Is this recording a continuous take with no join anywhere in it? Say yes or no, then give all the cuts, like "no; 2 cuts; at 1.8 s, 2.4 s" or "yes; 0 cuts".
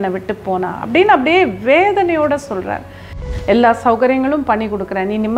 no; 1 cut; at 3.1 s